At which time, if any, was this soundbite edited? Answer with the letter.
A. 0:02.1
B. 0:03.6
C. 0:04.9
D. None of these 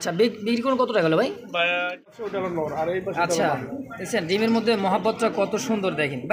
A